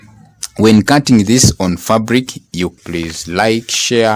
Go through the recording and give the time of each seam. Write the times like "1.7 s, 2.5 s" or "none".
2.7 s